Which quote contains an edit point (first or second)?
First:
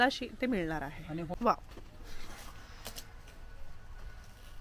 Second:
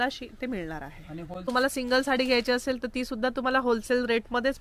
first